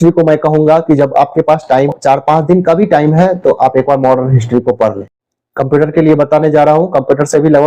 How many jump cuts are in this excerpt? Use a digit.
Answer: 2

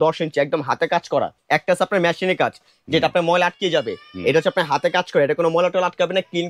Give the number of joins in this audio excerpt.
1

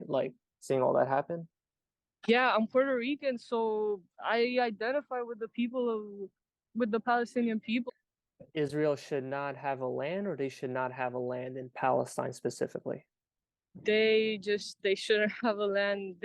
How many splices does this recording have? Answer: 1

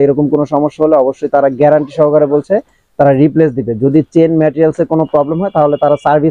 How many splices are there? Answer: 0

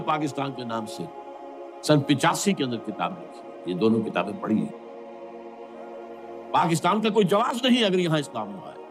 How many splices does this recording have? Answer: 0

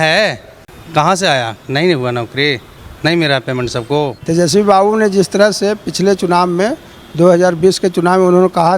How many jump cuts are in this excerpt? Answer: 1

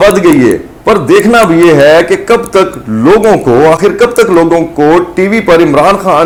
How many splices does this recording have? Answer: 0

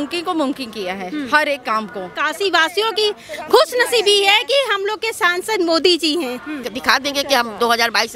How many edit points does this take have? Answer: 2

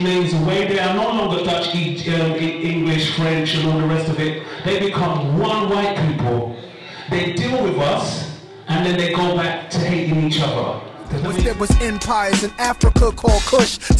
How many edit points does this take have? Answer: 1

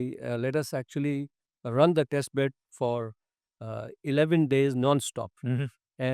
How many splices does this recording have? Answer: 0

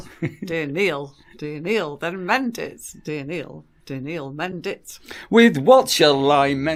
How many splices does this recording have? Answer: 0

